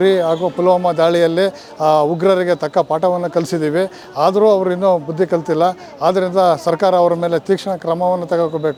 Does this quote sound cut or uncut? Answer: uncut